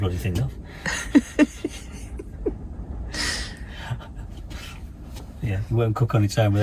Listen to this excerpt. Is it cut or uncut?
uncut